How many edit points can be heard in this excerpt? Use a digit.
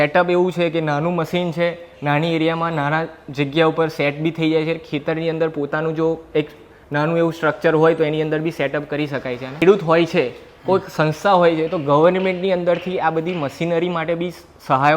1